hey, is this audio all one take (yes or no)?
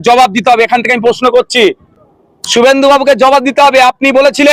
yes